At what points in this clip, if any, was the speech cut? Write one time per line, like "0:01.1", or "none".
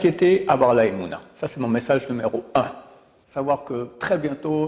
0:03.2